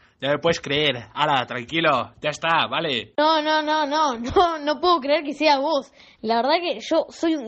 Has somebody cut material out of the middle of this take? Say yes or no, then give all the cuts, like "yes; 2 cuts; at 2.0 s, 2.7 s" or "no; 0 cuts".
yes; 1 cut; at 3.1 s